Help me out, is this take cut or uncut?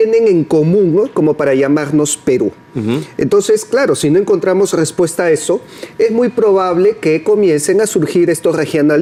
uncut